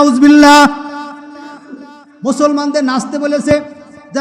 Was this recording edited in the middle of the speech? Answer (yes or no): no